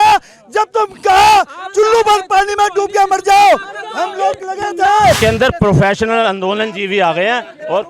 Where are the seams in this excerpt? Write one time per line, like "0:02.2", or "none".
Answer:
0:05.2